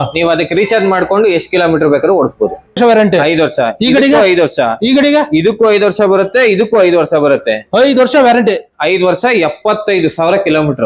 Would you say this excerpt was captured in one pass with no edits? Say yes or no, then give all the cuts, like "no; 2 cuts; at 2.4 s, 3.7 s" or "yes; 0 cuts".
no; 1 cut; at 2.8 s